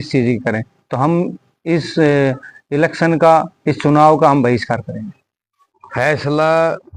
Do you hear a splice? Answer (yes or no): no